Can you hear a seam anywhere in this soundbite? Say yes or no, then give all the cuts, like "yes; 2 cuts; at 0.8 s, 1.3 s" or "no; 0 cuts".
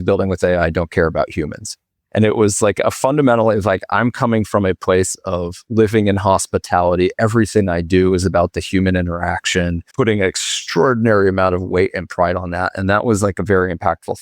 yes; 1 cut; at 9.8 s